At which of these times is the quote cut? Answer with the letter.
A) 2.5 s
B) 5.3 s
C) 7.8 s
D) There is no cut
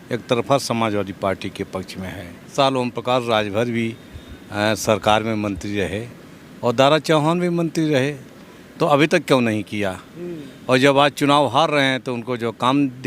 A